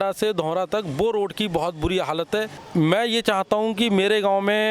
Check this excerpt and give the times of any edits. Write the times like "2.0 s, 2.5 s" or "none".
2.6 s